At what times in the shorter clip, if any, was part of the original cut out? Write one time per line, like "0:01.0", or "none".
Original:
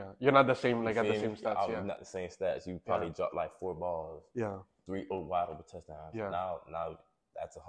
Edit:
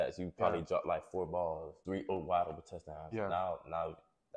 0:01.7